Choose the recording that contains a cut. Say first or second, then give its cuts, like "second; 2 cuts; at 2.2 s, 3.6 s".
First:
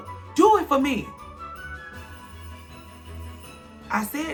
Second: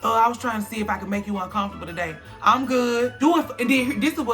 second; 1 cut; at 3.2 s